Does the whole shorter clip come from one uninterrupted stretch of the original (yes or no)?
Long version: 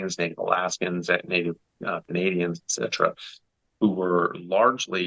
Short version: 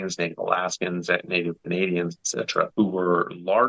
no